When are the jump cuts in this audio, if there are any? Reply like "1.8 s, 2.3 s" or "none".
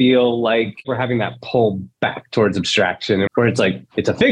0.8 s, 3.3 s